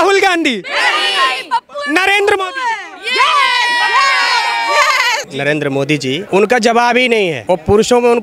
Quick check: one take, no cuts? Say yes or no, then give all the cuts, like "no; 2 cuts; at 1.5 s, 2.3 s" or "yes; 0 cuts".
no; 3 cuts; at 5.3 s, 6.2 s, 7.4 s